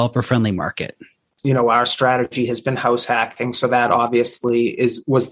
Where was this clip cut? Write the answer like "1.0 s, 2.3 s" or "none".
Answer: 1.3 s

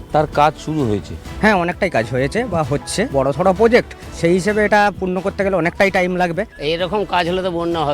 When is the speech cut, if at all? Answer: 1.2 s, 3.1 s, 4.1 s, 6.5 s

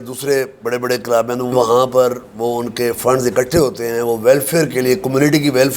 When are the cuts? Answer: 1.5 s

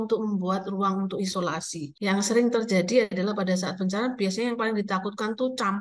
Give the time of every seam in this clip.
1.8 s

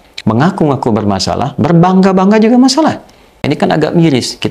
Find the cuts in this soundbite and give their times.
3.4 s

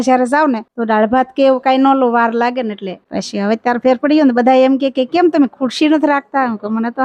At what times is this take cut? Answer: 3.0 s

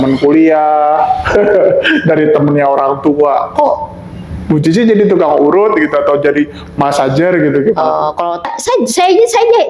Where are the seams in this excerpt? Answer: 8.4 s

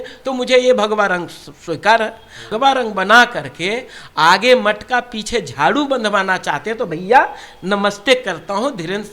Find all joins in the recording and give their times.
2.5 s

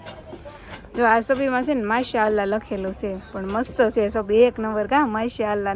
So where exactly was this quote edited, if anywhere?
none

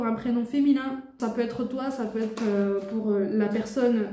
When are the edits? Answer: 1.1 s

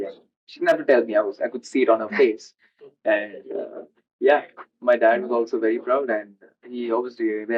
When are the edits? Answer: none

